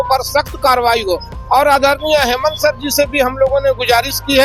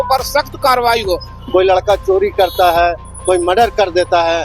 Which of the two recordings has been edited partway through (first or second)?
second